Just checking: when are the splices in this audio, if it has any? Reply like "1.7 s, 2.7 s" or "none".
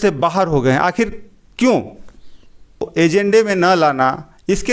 2.9 s